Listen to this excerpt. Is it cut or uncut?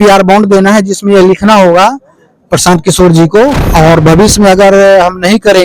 cut